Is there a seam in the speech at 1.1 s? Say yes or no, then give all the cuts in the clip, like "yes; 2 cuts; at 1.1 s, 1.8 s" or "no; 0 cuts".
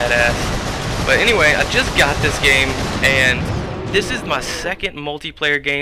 no; 1 cut; at 3.6 s